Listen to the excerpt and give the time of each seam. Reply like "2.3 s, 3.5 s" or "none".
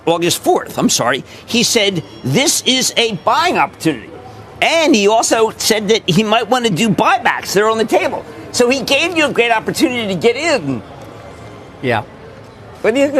none